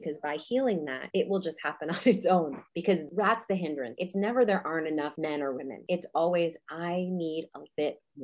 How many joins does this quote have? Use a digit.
4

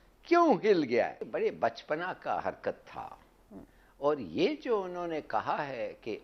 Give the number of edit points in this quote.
1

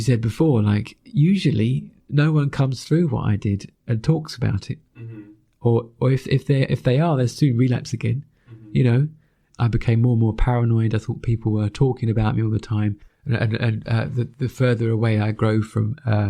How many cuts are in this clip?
2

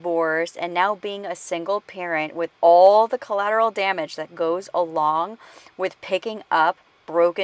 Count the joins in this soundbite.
0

